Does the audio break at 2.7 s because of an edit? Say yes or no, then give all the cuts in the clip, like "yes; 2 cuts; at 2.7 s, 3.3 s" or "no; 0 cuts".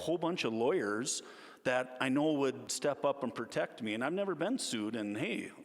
yes; 1 cut; at 2.7 s